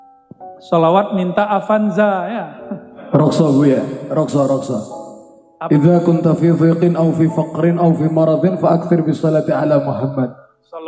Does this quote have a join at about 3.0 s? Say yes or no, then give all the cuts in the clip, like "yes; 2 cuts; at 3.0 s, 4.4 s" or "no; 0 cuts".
yes; 1 cut; at 3.0 s